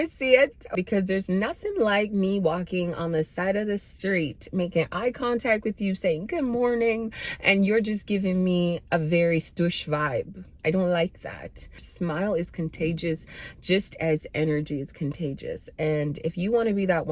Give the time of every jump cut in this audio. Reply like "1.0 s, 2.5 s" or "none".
0.7 s, 11.9 s